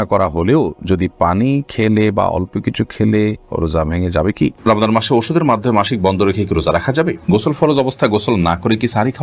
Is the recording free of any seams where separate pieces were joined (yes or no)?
no